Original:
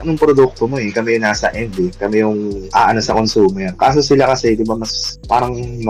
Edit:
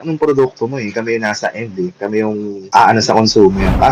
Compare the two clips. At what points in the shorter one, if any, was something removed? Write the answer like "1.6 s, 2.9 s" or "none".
none